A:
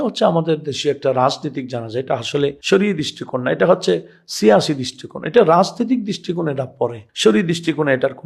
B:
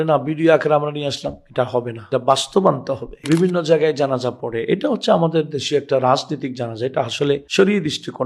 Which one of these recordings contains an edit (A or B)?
B